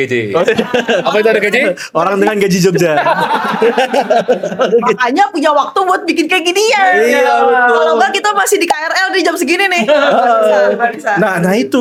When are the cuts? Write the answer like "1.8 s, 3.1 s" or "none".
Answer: none